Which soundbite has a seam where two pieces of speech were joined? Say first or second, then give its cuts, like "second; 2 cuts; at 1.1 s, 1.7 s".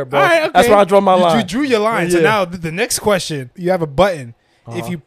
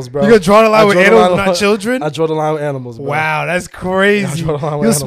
first; 1 cut; at 3.5 s